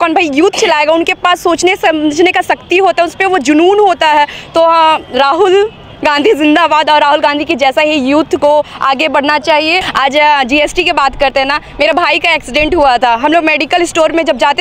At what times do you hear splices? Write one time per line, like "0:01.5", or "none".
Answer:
0:09.9